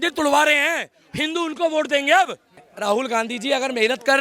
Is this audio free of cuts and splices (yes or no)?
no